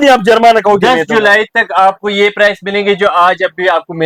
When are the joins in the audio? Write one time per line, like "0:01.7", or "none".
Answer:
none

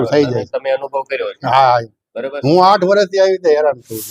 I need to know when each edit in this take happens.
none

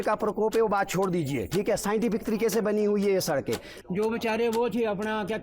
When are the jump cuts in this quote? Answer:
0:03.8

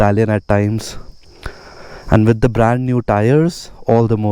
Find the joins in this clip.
none

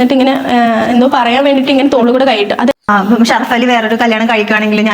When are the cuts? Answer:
0:02.9

